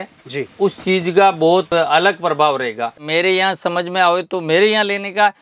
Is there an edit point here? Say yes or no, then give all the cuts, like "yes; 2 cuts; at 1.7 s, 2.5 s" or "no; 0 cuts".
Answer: yes; 2 cuts; at 1.7 s, 3.0 s